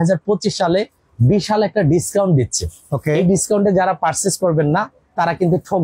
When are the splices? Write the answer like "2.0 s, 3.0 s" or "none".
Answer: none